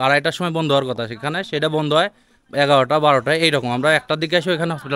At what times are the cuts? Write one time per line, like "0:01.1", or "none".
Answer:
none